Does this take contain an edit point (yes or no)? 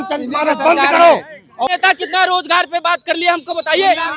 yes